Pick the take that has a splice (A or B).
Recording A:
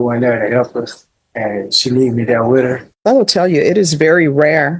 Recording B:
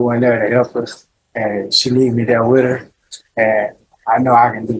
A